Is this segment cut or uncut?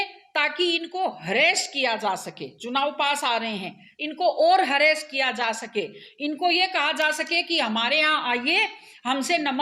uncut